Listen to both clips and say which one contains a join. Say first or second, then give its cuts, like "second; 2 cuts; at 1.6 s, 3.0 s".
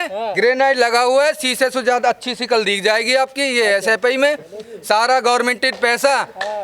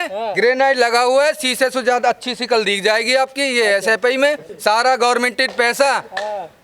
second; 1 cut; at 4.5 s